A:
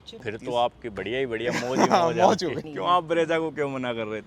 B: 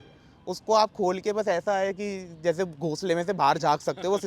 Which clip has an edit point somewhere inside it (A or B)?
A